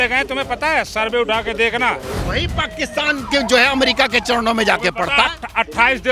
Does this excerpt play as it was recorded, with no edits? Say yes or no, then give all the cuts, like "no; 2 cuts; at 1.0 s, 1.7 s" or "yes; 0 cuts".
no; 1 cut; at 2.2 s